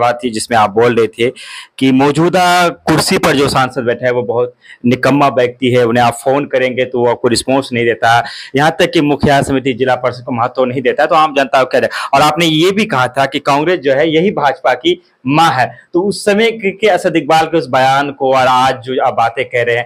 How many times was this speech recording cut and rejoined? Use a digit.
0